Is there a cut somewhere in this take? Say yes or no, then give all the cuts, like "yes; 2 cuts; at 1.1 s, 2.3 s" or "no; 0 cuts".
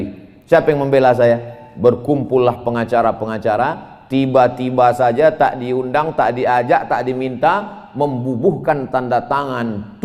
no; 0 cuts